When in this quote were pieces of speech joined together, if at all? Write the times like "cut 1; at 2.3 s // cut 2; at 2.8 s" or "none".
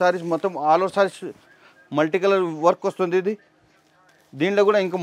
none